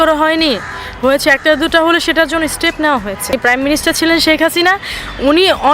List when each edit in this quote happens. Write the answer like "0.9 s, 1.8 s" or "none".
3.3 s